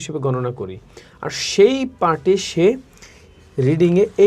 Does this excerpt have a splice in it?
no; 0 cuts

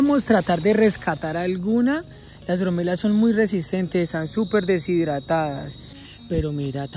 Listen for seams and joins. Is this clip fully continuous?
no; 1 cut; at 5.9 s

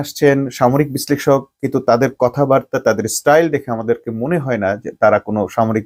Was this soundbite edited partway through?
no; 0 cuts

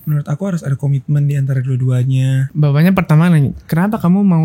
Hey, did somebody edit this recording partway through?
yes; 1 cut; at 2.5 s

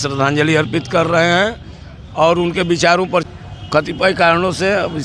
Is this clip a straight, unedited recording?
no; 1 cut; at 3.3 s

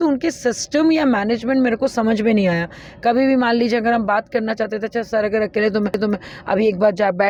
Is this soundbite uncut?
yes; 0 cuts

